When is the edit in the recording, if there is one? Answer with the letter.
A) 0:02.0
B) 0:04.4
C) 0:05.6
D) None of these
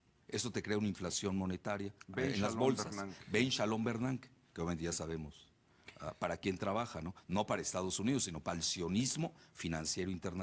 D